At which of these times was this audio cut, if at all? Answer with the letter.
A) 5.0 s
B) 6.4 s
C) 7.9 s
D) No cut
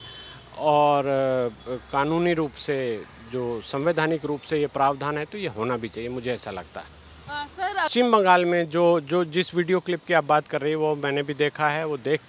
C